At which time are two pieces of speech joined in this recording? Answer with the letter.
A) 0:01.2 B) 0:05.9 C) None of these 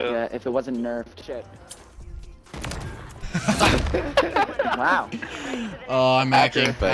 A